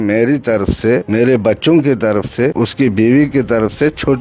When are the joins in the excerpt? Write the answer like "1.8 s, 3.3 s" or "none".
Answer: 1.1 s, 2.5 s